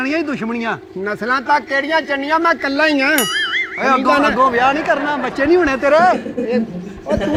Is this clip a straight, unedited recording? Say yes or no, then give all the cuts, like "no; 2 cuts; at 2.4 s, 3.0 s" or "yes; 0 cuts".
yes; 0 cuts